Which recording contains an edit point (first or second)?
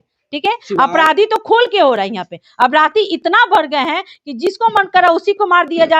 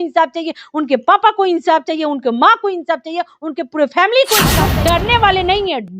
second